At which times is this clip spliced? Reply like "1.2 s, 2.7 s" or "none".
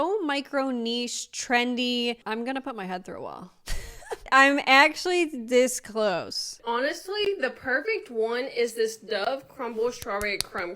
2.2 s, 6.5 s

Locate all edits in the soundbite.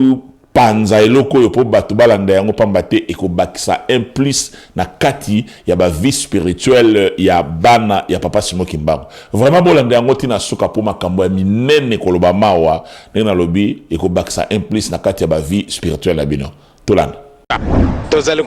17.5 s

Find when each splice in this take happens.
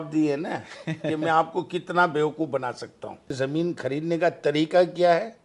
3.3 s

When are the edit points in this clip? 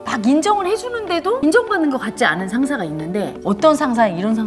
1.4 s, 3.3 s

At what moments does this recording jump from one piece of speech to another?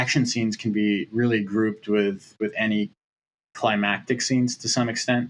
none

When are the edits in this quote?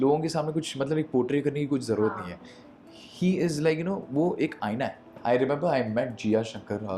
5.1 s

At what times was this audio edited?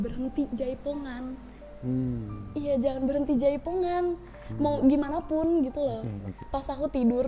6.3 s

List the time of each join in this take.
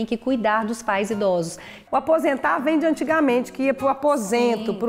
1.7 s

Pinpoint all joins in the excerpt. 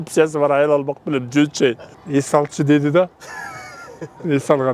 1.9 s

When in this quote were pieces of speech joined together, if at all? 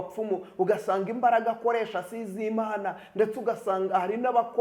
none

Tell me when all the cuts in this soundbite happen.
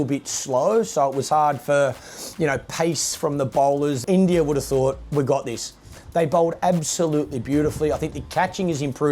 4.0 s

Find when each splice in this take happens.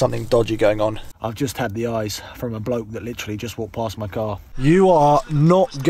1.1 s, 4.5 s

